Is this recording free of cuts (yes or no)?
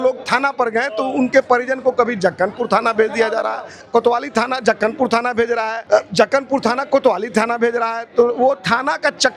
no